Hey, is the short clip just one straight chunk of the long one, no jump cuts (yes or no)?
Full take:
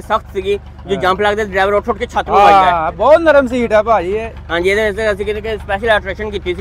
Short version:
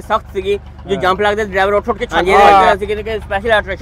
no